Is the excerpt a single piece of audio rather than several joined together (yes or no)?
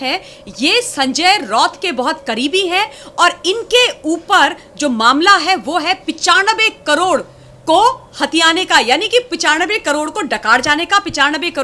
yes